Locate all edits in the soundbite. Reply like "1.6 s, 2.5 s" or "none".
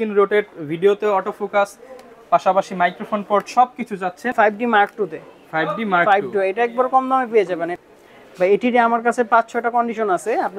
4.2 s, 7.7 s